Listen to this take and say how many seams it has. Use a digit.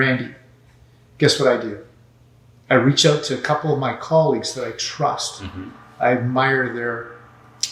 0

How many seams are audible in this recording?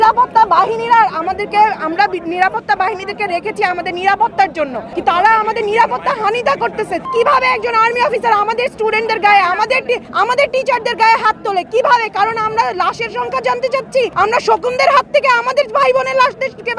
4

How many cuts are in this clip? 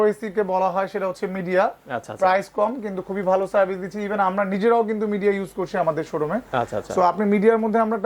0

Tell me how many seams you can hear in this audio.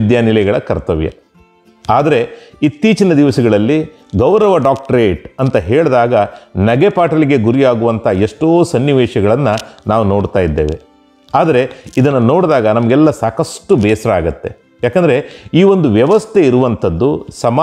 0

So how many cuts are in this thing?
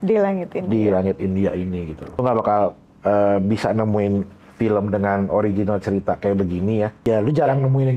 2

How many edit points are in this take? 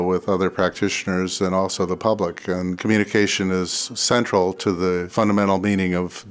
2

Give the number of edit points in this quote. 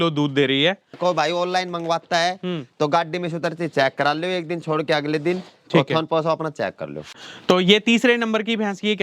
2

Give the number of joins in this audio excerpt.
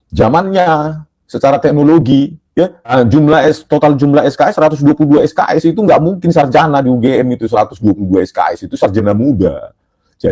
1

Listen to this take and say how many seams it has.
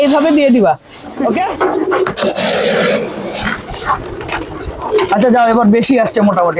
1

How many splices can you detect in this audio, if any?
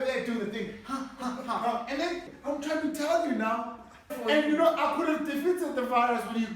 2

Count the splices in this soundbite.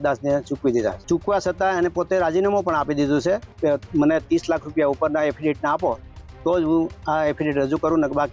2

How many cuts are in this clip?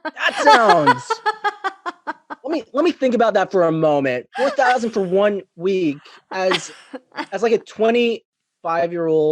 1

